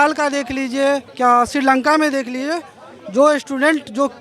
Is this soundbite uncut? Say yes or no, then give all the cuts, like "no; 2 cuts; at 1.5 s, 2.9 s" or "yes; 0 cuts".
no; 1 cut; at 1.1 s